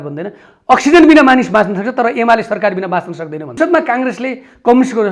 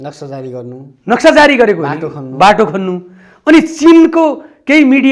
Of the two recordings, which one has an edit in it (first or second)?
first